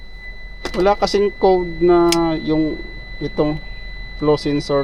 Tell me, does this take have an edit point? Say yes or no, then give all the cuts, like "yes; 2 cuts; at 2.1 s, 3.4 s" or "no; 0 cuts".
no; 0 cuts